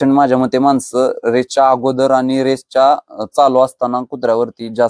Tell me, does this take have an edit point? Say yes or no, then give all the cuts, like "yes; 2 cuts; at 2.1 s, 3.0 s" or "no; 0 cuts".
no; 0 cuts